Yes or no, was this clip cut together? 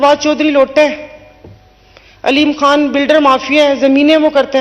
no